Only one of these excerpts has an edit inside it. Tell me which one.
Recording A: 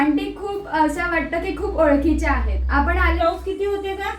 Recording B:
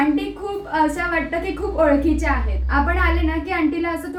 A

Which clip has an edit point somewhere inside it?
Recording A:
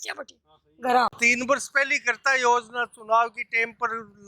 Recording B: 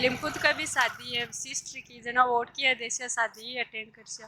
A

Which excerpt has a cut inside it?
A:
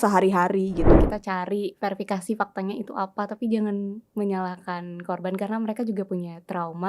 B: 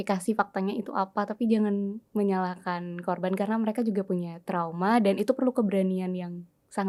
A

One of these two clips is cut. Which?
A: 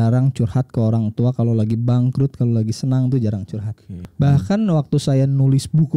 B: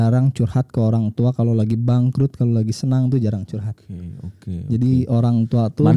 A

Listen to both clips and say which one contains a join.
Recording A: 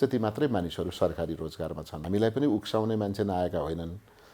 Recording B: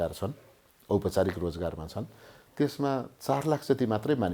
A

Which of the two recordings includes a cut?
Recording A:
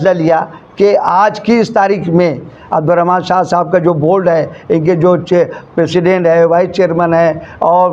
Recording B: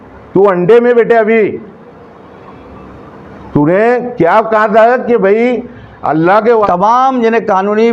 B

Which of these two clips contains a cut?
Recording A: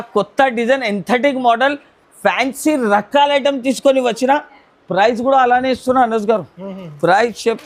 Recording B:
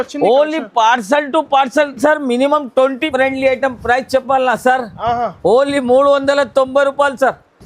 B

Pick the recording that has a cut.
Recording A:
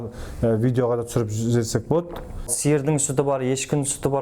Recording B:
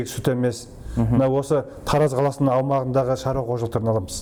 A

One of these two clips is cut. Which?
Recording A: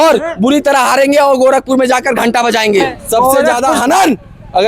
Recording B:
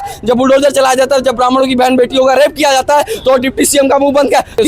A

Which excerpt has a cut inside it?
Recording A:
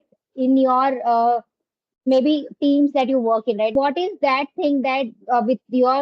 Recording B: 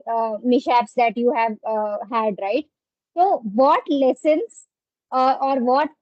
A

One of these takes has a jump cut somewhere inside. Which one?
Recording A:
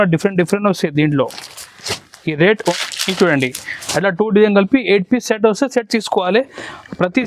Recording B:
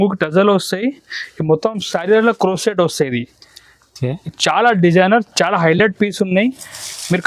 A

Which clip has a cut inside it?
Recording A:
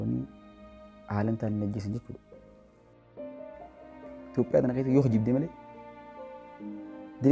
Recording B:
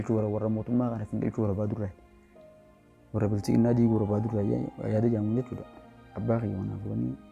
A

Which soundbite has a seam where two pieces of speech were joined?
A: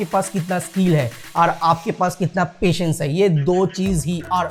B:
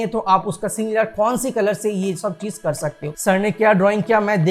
B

